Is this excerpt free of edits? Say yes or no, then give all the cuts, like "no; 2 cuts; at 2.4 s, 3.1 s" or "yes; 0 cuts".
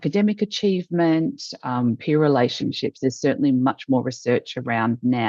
yes; 0 cuts